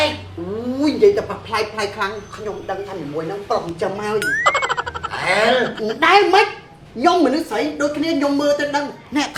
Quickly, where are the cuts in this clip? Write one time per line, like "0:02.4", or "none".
none